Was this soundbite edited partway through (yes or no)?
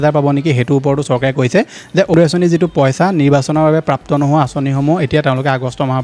no